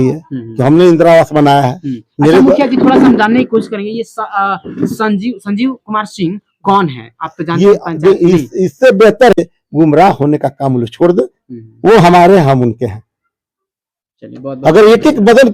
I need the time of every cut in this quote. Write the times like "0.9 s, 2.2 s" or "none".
9.4 s